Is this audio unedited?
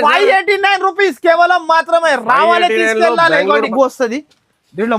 no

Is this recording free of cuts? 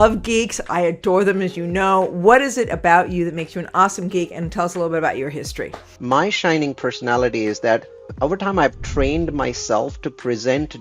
no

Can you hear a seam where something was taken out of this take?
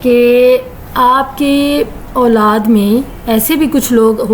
no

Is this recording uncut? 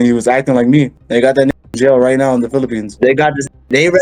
no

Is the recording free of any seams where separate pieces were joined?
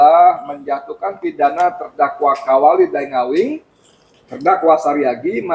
yes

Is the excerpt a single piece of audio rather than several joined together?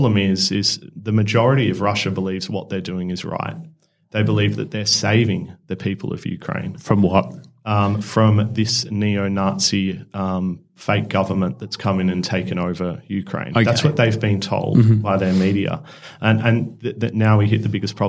yes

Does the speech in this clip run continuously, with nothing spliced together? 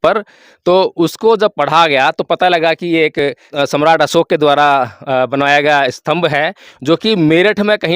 no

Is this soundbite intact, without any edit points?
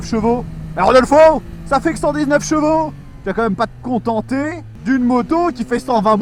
yes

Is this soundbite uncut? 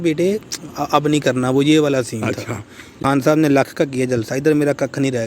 no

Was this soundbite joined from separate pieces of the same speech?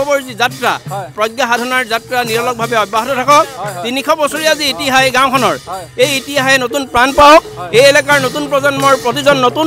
no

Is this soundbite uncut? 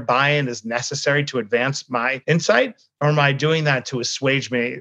no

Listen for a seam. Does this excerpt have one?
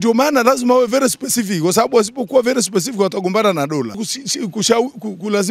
yes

